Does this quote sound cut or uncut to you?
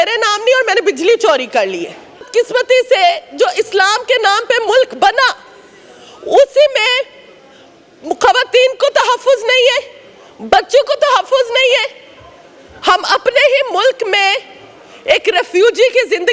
cut